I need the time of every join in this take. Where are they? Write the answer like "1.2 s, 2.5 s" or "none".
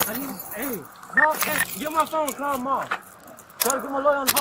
none